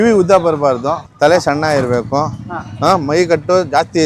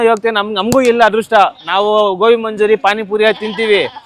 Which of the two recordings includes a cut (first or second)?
first